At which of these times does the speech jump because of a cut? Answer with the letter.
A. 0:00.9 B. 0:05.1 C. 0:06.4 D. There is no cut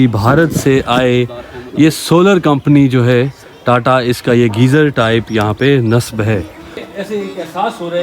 C